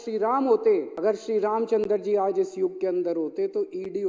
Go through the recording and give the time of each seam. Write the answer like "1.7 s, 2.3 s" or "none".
0.9 s